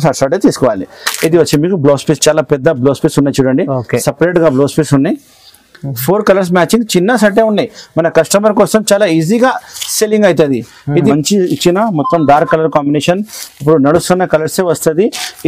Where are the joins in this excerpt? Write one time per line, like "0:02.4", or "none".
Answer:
0:11.1